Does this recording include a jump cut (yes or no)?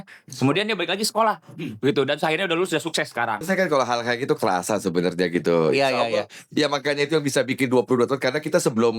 yes